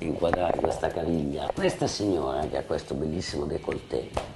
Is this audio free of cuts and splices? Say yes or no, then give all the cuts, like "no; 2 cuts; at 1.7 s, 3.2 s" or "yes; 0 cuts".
no; 1 cut; at 1.5 s